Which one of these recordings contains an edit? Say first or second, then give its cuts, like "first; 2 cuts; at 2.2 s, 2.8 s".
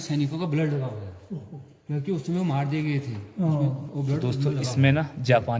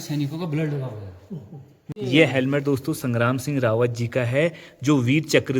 second; 1 cut; at 1.8 s